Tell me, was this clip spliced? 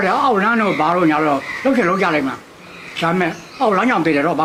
no; 0 cuts

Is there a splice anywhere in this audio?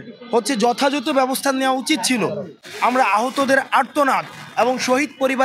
yes; 1 cut; at 2.6 s

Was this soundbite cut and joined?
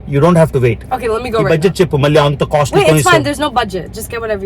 yes; 1 cut; at 1.5 s

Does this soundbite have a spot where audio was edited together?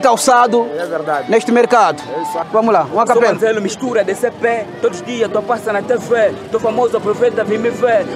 yes; 1 cut; at 2.4 s

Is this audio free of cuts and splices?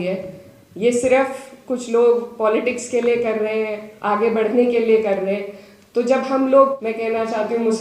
no; 1 cut; at 6.8 s

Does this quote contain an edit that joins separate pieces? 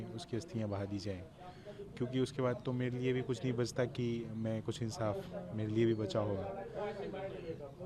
no; 0 cuts

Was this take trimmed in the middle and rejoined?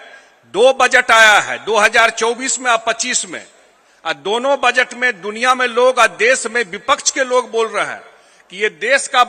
no; 0 cuts

